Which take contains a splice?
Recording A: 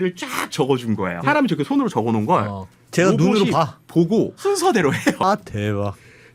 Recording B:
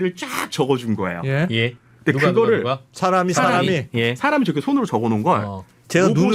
A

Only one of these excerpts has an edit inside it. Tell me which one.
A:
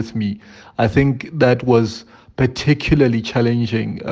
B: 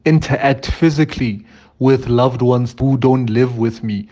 B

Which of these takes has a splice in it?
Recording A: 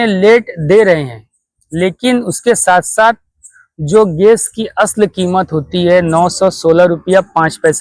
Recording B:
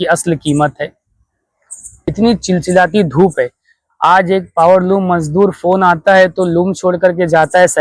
B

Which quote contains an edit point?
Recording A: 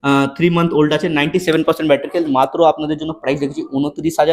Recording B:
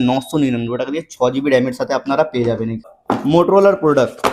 B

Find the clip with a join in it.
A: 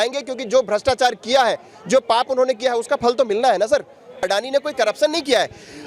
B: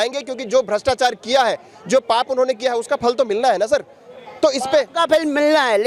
A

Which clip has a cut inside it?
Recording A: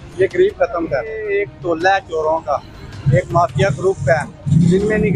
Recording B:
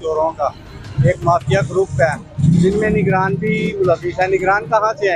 A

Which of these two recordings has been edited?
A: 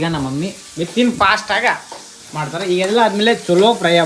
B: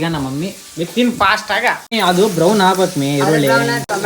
B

